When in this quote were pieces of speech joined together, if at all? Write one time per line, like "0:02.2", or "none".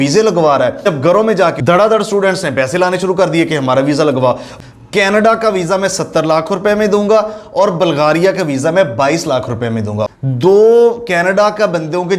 0:00.9
0:04.5
0:10.1

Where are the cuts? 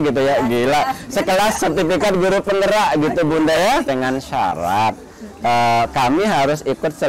0:03.9

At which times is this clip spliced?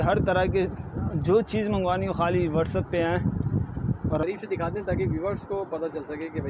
0:04.2

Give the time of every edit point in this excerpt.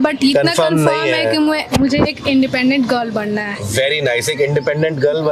none

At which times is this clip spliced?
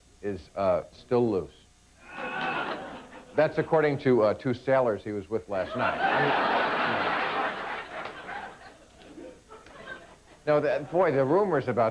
0:00.9

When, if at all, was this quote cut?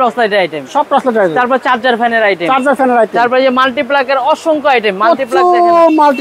none

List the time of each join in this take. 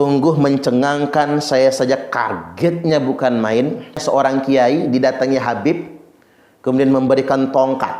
0:04.0

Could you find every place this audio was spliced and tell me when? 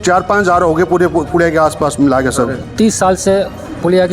0:02.6

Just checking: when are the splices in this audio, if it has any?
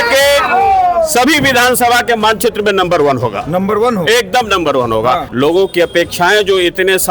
0:05.3

